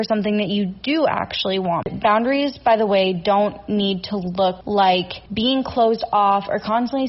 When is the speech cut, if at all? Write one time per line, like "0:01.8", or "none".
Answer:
0:01.9
0:04.6
0:05.2